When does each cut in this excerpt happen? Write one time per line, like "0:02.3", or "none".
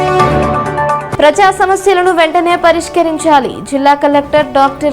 0:01.0